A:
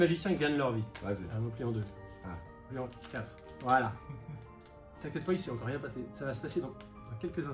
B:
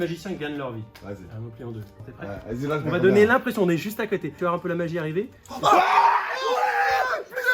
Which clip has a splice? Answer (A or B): B